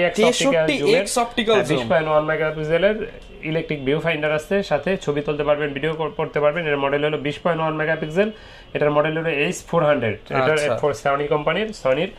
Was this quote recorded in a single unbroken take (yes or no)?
yes